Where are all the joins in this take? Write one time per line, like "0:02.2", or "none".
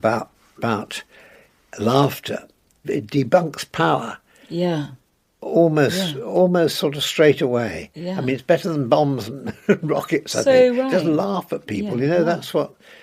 0:02.8